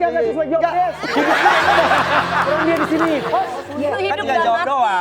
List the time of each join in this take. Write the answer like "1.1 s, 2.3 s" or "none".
3.5 s